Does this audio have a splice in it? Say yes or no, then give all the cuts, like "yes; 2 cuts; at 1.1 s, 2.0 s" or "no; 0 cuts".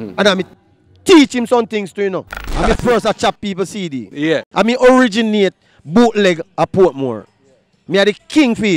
yes; 1 cut; at 2.4 s